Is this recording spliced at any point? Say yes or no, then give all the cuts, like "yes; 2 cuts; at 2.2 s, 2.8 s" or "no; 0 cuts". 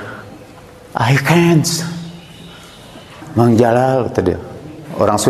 no; 0 cuts